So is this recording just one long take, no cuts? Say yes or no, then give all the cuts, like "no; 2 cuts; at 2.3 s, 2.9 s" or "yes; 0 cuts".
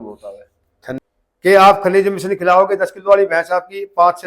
no; 1 cut; at 1.0 s